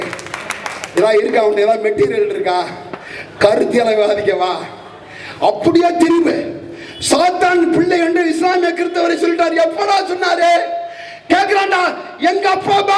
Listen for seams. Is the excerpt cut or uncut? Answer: uncut